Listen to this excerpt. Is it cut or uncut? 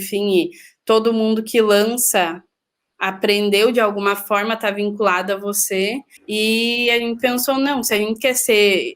cut